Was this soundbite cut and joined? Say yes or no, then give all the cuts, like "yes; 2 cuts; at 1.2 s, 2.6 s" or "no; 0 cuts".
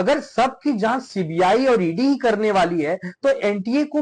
no; 0 cuts